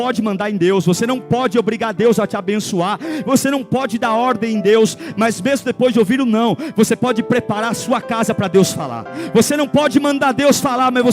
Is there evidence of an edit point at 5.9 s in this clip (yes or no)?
no